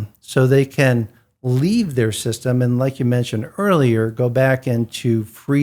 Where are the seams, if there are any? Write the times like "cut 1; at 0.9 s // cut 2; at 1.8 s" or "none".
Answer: none